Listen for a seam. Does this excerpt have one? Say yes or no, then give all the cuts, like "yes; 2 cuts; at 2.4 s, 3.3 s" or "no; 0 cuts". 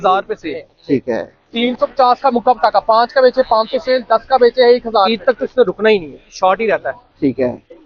yes; 2 cuts; at 1.6 s, 5.2 s